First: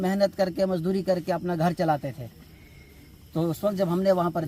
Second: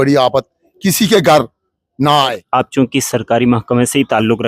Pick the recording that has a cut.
second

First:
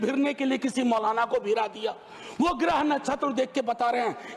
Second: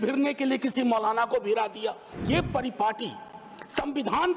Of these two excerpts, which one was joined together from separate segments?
second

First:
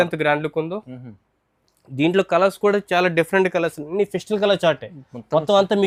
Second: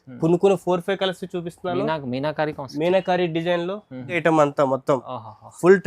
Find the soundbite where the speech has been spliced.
second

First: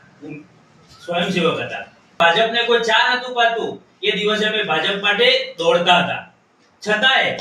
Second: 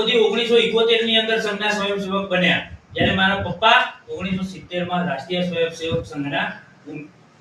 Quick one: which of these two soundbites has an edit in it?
first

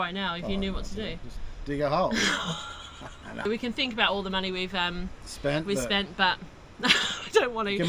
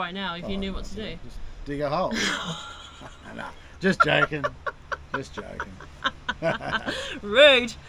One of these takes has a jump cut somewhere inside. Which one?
first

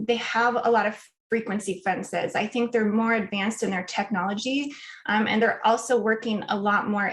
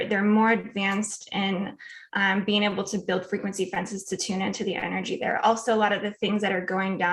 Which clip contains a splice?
first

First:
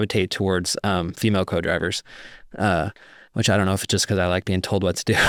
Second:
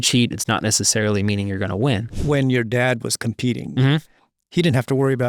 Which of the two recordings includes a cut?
second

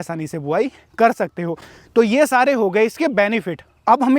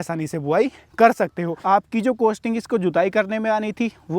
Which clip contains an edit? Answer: second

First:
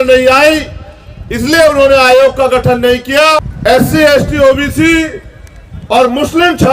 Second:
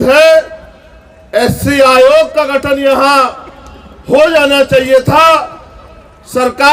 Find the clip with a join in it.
first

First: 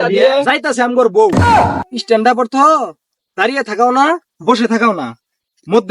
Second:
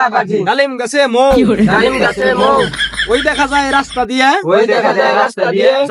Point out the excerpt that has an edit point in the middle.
first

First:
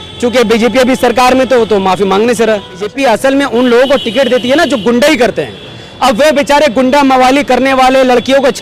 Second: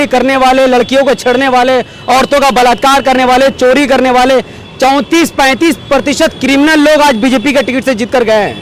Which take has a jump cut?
first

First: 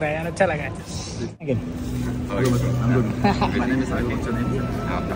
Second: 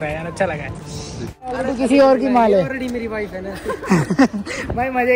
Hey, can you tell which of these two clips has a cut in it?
second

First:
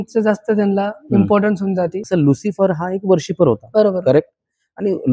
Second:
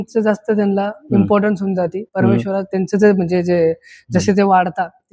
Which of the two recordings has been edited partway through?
first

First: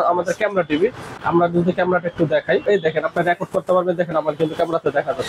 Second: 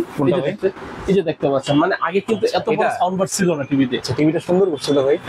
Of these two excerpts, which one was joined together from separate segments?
first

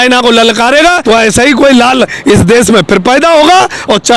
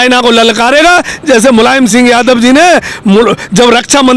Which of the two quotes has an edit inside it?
first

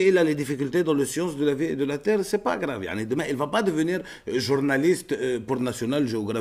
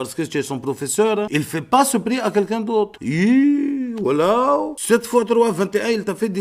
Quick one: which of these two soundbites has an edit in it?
second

